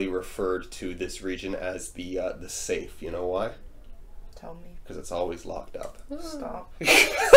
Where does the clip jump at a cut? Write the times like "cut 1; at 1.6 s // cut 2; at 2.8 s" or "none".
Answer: none